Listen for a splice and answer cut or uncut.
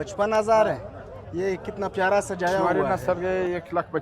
cut